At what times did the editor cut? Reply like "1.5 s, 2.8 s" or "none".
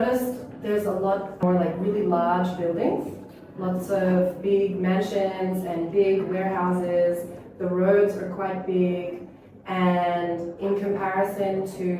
1.4 s